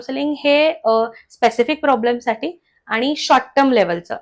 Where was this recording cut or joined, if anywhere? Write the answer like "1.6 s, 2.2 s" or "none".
none

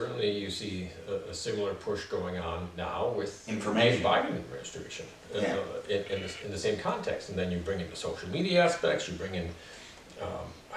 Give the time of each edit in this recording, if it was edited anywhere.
2.7 s, 3.4 s

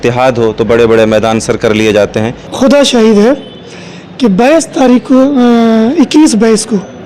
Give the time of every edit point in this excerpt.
2.4 s

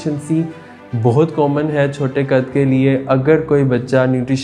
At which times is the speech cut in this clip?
none

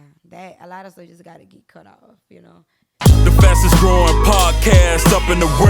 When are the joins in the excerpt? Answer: 3.0 s

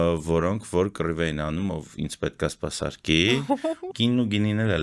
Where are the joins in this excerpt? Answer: 3.9 s

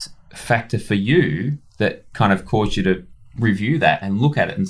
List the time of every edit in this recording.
none

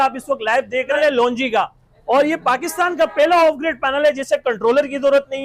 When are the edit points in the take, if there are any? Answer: 1.0 s

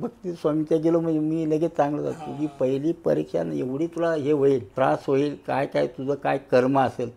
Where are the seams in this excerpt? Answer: 4.7 s

